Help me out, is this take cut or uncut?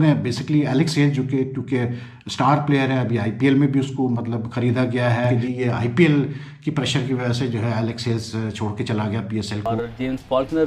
cut